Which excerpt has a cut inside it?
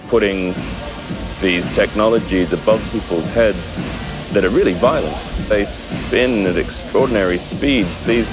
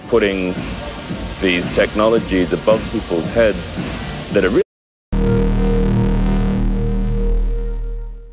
first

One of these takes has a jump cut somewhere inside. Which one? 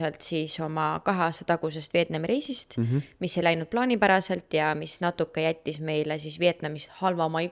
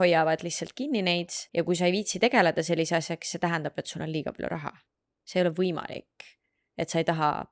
second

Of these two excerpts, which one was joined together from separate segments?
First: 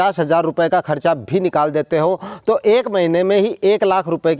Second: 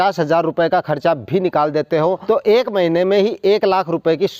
second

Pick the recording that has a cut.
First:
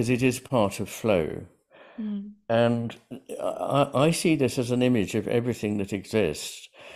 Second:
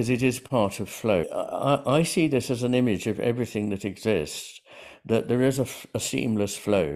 second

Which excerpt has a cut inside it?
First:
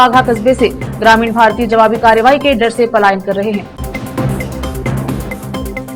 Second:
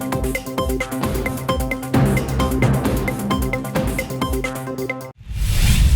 second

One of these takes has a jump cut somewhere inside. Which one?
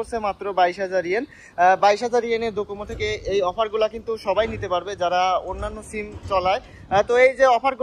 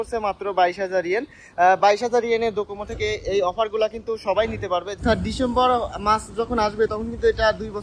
second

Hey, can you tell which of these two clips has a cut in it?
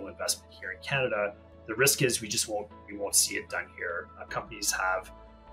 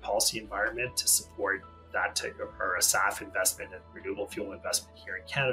first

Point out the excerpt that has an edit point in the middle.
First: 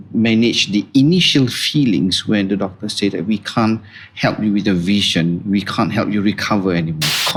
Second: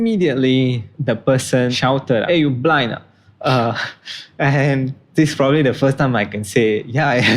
second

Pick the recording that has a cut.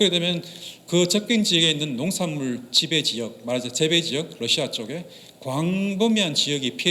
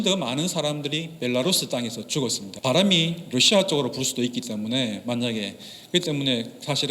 second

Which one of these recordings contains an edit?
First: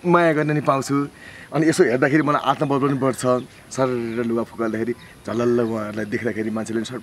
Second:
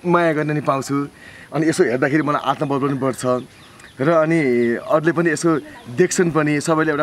first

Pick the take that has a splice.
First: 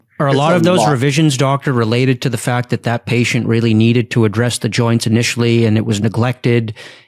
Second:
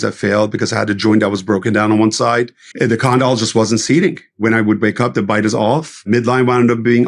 second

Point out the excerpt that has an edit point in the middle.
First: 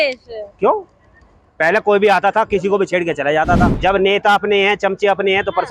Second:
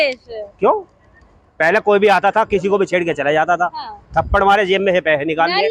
first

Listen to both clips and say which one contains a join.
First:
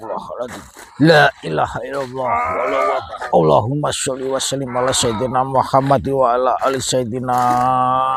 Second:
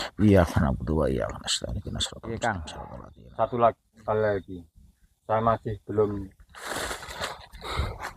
second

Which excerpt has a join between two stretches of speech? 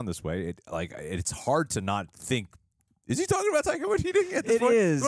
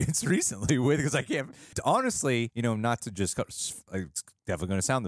second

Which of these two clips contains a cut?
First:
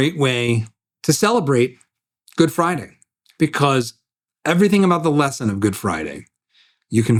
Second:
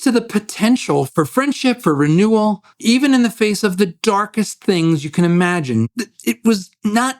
second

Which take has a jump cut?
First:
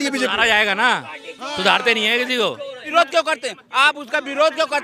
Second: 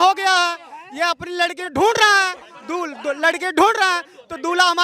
first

